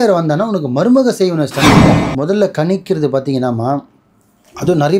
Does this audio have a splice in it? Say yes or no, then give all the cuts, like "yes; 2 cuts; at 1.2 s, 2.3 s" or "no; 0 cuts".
yes; 1 cut; at 1.9 s